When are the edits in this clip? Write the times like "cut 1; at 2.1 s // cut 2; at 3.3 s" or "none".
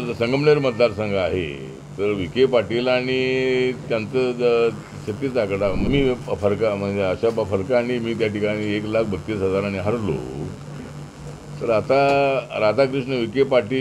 cut 1; at 5.9 s